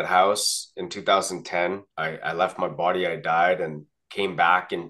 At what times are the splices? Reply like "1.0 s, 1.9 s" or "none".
1.9 s